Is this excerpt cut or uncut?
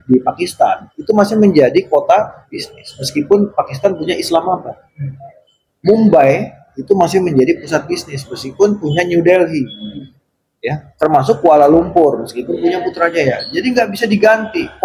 uncut